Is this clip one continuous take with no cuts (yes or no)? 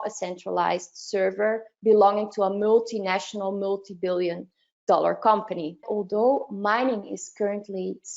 no